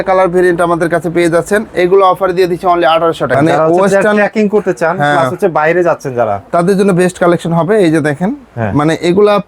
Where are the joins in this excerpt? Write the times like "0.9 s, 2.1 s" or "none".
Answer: 3.3 s